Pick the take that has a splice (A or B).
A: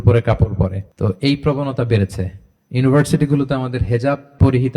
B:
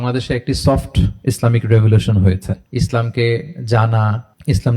B